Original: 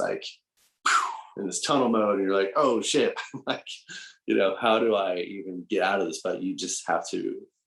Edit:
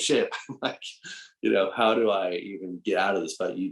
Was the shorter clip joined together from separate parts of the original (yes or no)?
no